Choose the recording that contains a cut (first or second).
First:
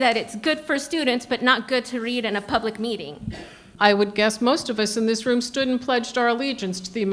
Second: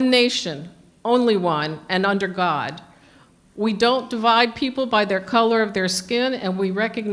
first